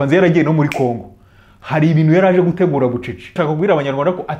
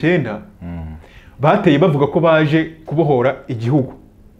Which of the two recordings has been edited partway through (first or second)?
first